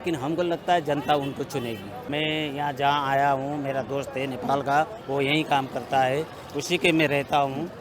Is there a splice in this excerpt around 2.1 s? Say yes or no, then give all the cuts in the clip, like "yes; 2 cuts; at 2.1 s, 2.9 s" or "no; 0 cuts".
yes; 1 cut; at 2.1 s